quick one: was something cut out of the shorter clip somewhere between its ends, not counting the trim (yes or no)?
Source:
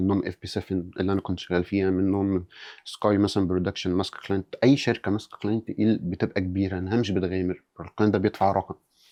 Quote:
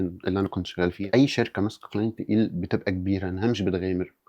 yes